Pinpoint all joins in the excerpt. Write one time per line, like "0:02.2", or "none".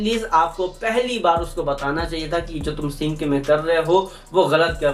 none